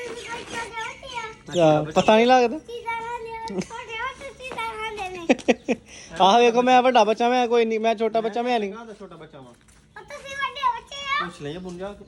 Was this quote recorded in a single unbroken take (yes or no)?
yes